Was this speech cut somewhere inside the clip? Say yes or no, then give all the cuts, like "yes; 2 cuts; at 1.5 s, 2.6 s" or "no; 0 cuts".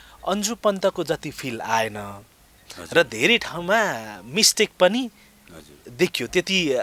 no; 0 cuts